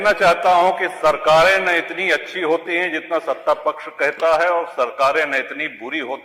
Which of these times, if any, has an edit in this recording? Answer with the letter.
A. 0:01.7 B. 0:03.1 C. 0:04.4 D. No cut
D